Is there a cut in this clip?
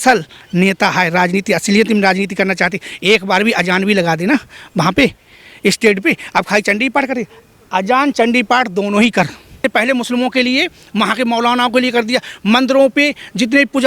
yes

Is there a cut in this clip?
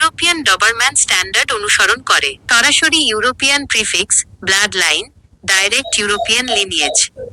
no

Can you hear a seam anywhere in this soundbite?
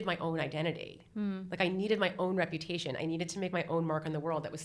no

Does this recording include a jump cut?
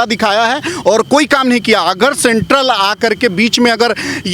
no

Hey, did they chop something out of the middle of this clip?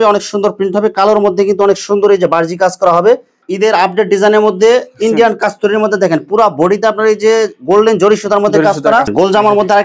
yes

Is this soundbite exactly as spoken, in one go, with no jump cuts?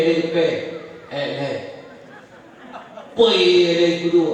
yes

